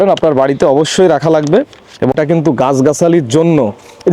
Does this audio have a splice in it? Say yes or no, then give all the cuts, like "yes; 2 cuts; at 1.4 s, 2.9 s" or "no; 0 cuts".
yes; 1 cut; at 2.1 s